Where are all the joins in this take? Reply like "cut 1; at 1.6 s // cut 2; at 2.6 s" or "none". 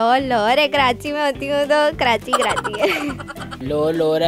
none

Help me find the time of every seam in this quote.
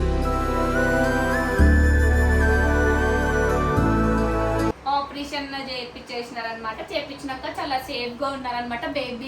cut 1; at 4.8 s

